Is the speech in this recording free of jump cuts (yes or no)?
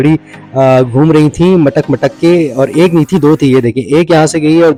yes